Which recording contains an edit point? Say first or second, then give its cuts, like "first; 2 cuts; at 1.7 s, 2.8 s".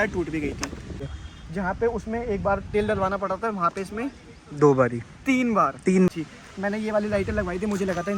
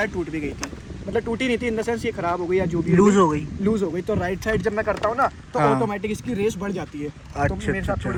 first; 2 cuts; at 1.0 s, 6.1 s